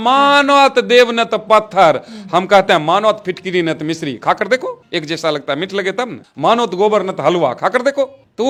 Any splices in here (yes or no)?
no